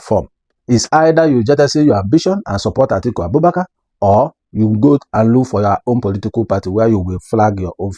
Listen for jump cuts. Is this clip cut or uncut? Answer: uncut